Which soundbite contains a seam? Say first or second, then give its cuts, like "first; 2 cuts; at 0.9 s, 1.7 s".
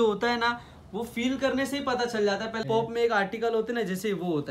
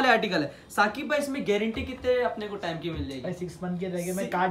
first; 1 cut; at 2.6 s